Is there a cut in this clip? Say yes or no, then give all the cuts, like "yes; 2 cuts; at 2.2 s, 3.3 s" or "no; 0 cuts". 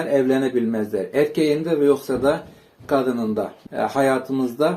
yes; 1 cut; at 3.6 s